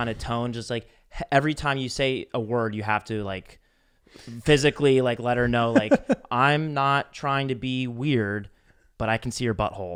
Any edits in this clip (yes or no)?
no